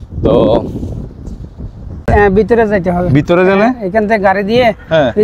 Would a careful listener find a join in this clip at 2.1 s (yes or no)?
yes